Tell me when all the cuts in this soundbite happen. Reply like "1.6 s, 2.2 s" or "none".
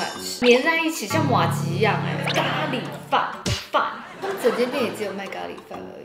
2.2 s, 4.1 s